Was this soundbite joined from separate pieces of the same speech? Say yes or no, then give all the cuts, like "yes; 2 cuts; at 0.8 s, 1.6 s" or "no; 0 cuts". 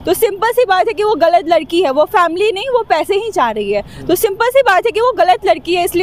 no; 0 cuts